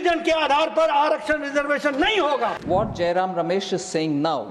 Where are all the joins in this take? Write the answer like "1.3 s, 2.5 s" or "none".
2.6 s